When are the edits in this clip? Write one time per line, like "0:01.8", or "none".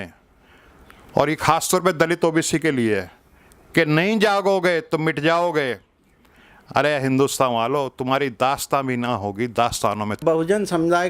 0:10.2